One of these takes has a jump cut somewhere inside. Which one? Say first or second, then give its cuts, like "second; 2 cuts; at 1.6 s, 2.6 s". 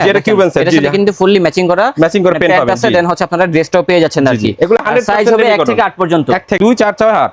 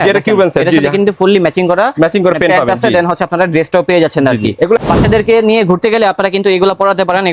second; 1 cut; at 4.8 s